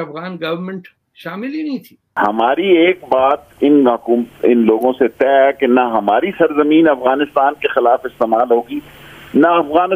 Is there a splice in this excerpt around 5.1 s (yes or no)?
no